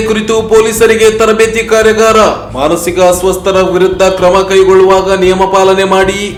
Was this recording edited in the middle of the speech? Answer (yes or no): no